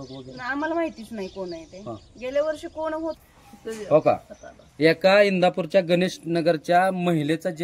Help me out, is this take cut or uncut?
cut